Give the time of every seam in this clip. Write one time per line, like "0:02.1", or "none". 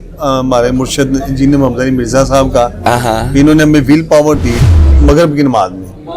0:04.9